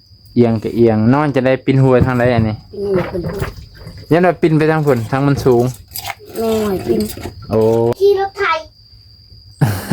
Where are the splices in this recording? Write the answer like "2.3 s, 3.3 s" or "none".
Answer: 8.0 s